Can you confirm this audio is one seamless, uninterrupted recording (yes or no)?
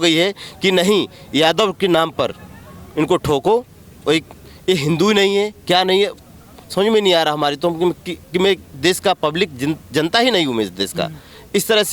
yes